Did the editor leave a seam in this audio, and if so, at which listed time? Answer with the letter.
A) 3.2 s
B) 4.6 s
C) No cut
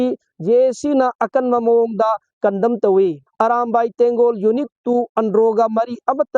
A